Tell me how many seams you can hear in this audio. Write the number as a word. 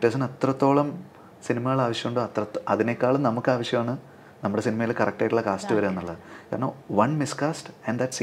zero